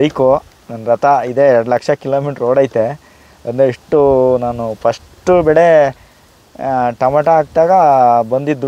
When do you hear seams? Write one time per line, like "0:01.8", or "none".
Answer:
none